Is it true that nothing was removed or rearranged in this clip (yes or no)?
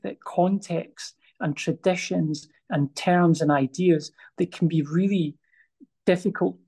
yes